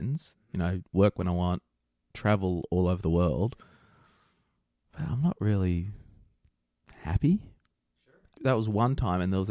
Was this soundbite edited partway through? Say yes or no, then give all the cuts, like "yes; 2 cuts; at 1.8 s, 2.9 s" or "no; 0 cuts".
yes; 1 cut; at 8.0 s